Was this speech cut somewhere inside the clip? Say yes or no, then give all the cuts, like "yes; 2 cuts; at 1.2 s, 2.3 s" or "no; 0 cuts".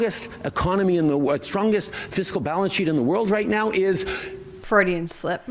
yes; 1 cut; at 4.5 s